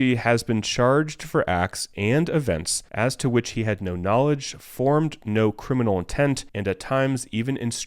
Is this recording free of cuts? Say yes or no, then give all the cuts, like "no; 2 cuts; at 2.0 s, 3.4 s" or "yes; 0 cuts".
no; 2 cuts; at 2.8 s, 6.5 s